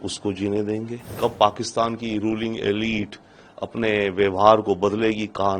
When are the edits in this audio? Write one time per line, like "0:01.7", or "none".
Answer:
0:01.1